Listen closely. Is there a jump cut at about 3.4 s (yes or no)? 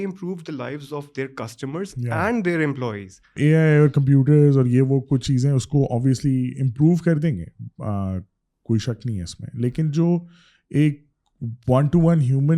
yes